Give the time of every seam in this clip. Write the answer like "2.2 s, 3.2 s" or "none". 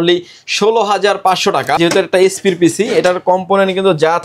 1.8 s